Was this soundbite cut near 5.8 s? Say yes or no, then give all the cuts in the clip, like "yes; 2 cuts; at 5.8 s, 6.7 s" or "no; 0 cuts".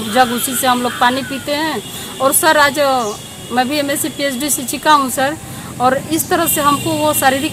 no; 0 cuts